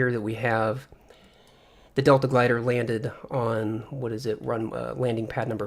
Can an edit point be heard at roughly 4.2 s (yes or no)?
yes